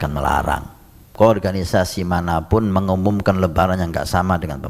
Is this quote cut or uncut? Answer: cut